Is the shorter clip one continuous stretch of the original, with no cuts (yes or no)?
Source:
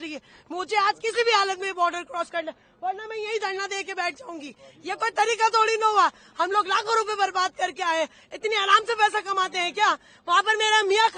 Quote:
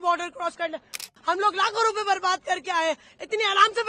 no